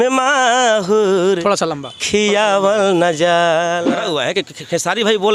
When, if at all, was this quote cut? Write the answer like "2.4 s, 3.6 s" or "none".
3.9 s